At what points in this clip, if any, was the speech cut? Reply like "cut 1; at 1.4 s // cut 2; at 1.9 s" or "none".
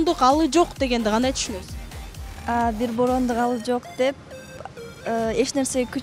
none